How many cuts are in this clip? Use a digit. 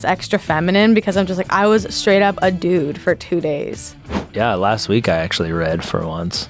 1